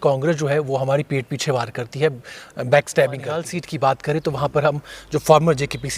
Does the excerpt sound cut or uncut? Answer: cut